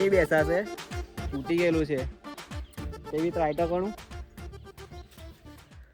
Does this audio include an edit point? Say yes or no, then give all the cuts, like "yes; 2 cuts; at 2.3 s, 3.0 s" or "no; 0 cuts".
no; 0 cuts